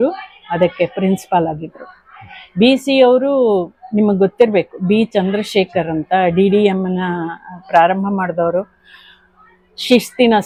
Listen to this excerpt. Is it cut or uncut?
uncut